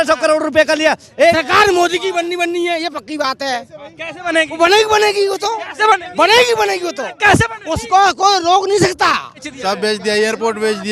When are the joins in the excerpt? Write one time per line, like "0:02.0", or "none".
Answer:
0:01.4
0:09.5